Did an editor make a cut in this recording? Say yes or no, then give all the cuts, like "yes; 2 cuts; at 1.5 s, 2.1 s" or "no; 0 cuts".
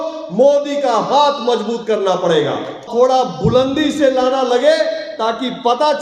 yes; 1 cut; at 2.9 s